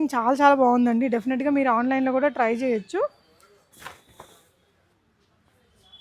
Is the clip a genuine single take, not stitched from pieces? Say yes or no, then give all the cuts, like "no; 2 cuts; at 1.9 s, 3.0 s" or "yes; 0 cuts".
yes; 0 cuts